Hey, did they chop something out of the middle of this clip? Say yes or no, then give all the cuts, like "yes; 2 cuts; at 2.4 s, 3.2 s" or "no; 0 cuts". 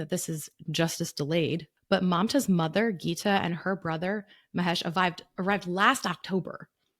yes; 1 cut; at 1.7 s